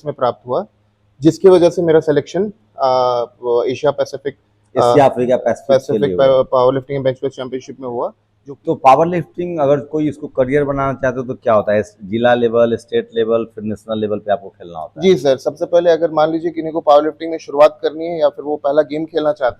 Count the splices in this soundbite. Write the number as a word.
one